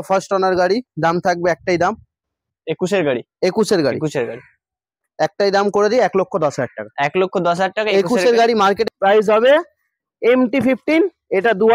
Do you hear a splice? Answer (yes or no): yes